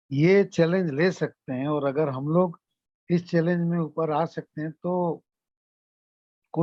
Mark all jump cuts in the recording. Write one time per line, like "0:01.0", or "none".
none